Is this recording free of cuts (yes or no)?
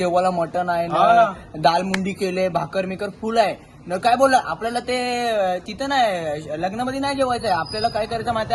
yes